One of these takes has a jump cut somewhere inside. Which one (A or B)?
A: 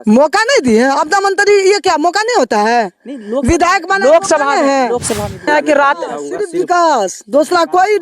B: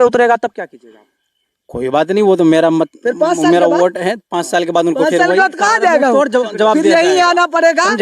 A